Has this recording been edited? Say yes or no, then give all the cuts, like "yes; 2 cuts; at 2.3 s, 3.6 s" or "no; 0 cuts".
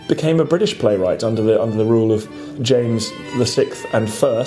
yes; 1 cut; at 2.7 s